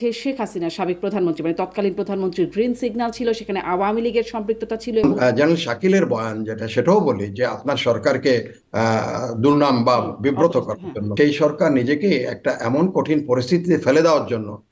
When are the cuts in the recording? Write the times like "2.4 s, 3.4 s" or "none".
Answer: 5.0 s, 11.1 s